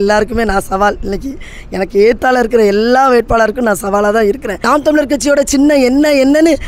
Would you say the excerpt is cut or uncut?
cut